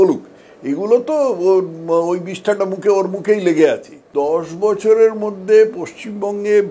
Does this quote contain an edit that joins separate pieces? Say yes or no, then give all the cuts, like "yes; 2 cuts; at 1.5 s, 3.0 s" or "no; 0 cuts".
yes; 1 cut; at 4.1 s